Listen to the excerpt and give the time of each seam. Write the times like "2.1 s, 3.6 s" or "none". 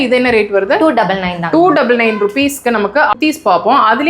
3.1 s

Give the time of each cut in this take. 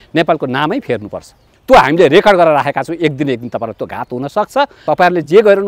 1.5 s, 4.8 s

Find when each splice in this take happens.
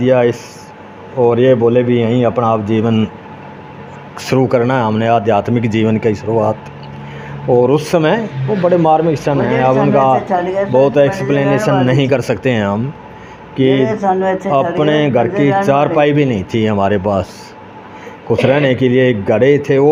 none

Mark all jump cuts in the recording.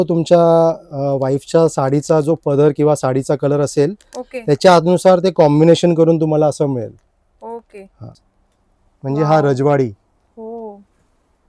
8.2 s

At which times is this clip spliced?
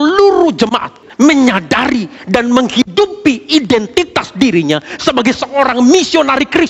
1.0 s

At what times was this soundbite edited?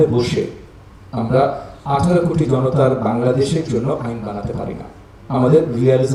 none

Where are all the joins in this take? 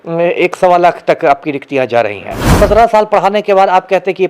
2.6 s

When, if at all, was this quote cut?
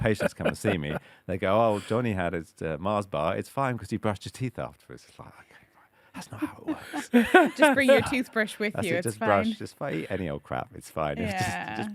none

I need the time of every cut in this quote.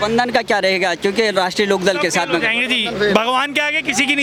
none

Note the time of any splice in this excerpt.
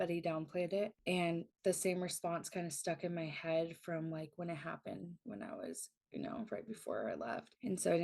1.5 s

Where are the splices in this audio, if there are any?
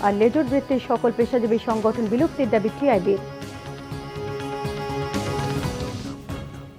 5.9 s

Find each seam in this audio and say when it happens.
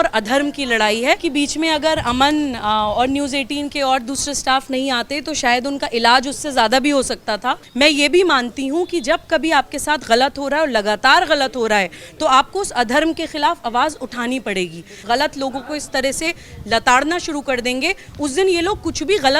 1.2 s, 7.6 s, 15.0 s

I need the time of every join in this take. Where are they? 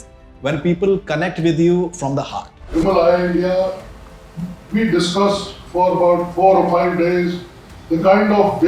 2.7 s

